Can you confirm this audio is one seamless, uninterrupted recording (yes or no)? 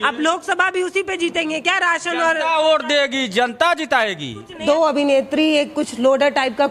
no